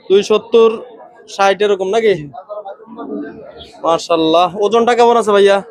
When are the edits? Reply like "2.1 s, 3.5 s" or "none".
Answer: none